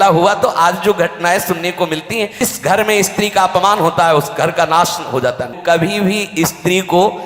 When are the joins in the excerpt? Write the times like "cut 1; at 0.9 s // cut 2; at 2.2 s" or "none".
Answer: cut 1; at 2.3 s // cut 2; at 5.6 s